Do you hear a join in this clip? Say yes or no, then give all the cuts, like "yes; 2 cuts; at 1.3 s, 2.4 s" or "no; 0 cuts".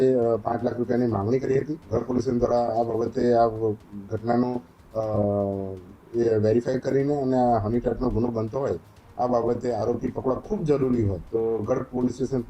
yes; 2 cuts; at 1.8 s, 11.2 s